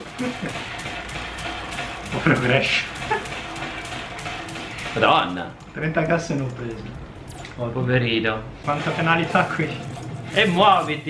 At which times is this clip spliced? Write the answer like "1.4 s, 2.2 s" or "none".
8.6 s